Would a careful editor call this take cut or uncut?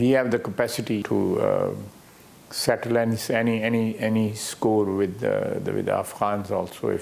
cut